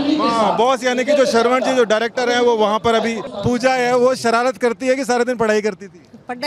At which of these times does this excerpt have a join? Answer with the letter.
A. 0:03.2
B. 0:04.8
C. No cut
A